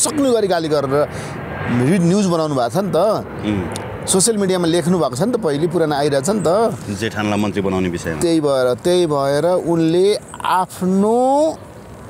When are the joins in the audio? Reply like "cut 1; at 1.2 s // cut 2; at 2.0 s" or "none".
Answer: none